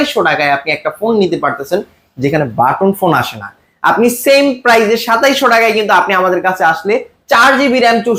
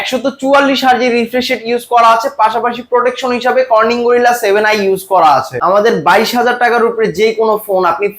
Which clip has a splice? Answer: second; 1 cut; at 5.5 s

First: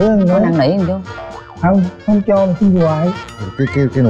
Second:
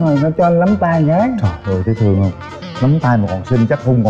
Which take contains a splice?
second; 1 cut; at 1.4 s

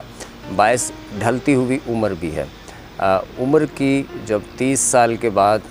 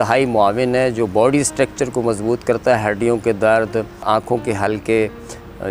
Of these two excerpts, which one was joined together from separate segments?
second; 1 cut; at 4.0 s

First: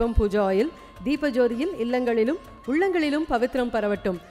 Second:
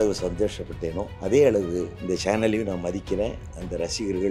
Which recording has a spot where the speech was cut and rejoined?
second; 2 cuts; at 1.1 s, 1.9 s

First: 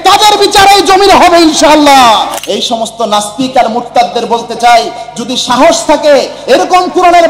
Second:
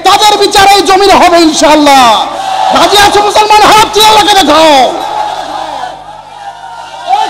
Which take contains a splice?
first; 1 cut; at 2.4 s

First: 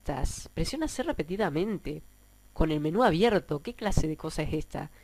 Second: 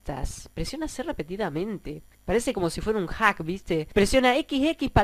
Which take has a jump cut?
second; 2 cuts; at 2.1 s, 3.8 s

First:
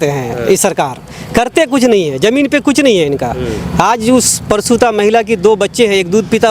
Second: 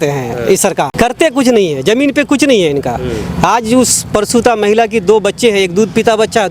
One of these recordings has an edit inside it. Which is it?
second; 1 cut; at 0.9 s

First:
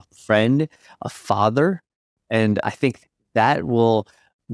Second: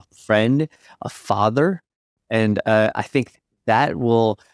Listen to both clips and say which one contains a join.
first; 1 cut; at 2.6 s

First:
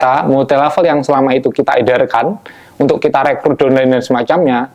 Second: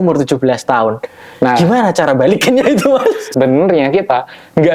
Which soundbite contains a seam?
second; 1 cut; at 3.3 s

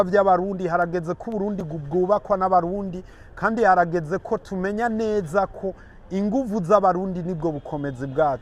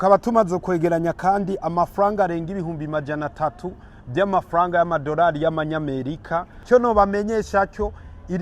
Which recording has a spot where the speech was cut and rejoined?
second; 1 cut; at 6.5 s

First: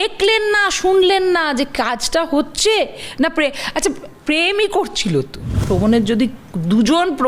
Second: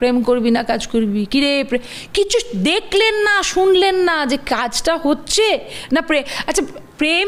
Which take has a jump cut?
first; 1 cut; at 5.6 s

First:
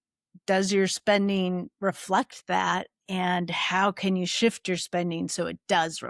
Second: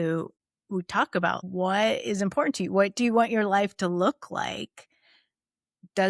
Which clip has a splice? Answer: second; 1 cut; at 1.4 s

